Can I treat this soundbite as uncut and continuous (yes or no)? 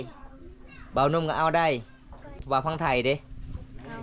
no